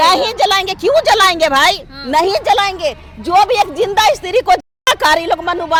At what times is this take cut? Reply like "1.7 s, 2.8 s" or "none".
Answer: none

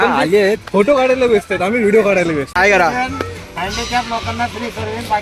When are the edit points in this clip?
2.5 s

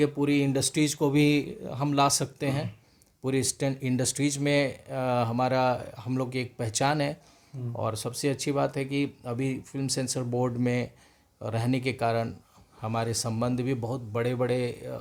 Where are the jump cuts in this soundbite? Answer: none

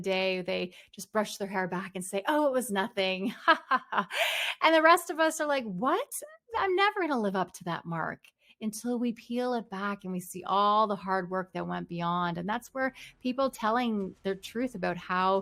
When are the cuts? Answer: none

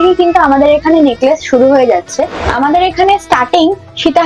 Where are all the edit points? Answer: 2.4 s

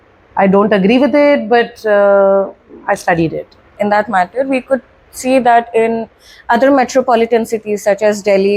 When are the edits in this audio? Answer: 3.7 s

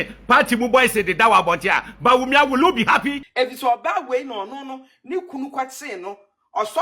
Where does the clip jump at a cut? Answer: 3.2 s

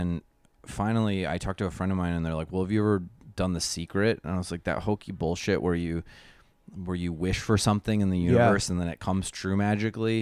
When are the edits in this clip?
none

